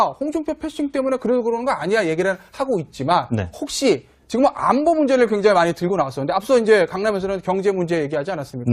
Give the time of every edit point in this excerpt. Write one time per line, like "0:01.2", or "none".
0:01.9